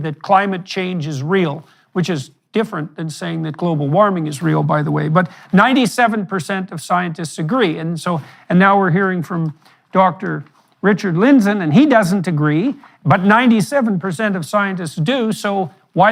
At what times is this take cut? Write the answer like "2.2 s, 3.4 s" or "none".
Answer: none